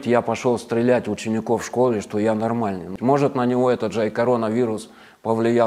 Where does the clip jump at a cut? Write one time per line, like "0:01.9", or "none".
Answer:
0:02.9